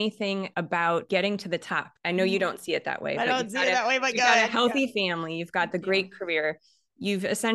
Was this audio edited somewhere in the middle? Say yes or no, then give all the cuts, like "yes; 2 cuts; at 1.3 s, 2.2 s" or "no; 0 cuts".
yes; 2 cuts; at 1.0 s, 1.9 s